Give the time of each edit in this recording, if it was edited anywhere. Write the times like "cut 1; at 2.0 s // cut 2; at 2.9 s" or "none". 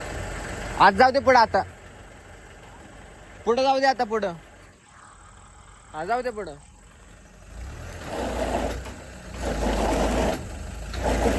none

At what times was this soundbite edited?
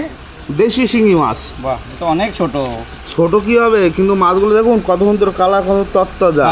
none

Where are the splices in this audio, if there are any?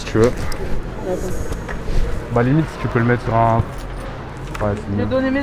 none

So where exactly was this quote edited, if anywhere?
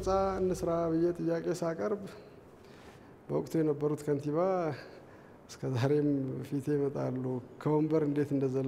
none

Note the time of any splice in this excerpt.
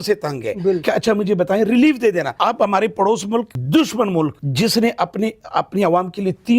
cut 1; at 0.8 s // cut 2; at 2.3 s // cut 3; at 3.6 s // cut 4; at 4.4 s

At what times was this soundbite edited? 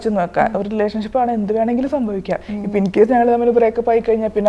none

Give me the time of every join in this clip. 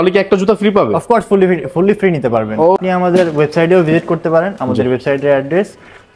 cut 1; at 2.8 s

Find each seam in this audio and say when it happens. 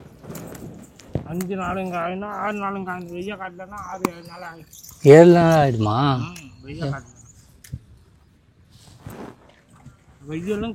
none

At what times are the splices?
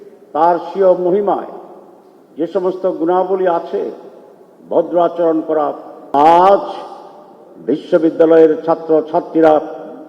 cut 1; at 6.1 s

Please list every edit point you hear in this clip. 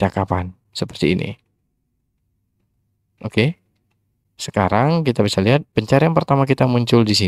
cut 1; at 5.7 s

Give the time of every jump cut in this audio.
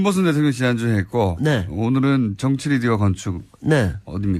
cut 1; at 1.3 s

